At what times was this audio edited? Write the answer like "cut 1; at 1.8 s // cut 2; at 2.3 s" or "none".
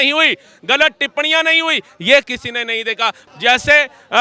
cut 1; at 3.2 s